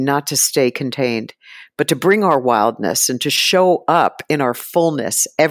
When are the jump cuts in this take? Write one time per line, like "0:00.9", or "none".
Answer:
none